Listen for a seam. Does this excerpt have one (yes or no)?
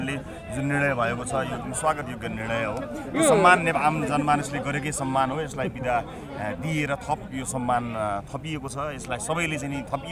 no